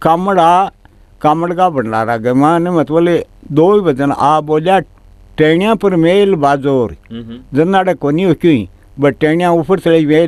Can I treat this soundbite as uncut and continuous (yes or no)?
yes